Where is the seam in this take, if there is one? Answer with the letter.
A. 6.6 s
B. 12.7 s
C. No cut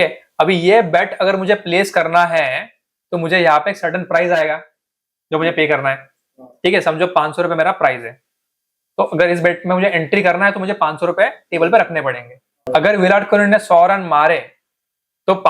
B